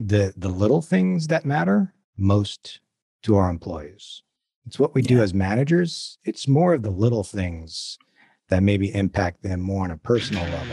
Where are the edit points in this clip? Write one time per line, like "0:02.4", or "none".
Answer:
none